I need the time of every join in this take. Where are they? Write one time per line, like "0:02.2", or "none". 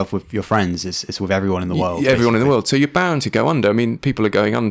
none

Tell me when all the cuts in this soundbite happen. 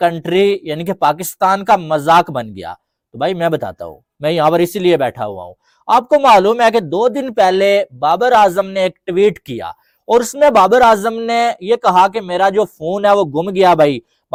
none

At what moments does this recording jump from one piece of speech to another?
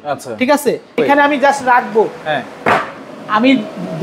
0:01.0

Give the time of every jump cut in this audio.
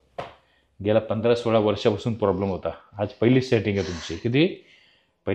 none

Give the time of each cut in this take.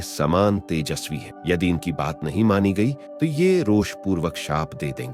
none

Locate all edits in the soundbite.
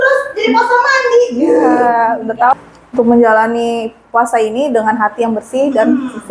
0:02.5

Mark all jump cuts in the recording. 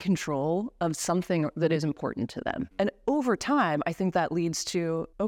0:02.6

